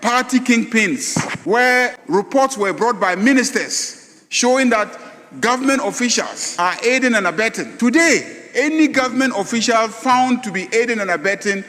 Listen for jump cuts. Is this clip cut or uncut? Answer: cut